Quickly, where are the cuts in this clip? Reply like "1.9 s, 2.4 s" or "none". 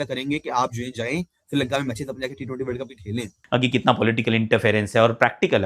3.4 s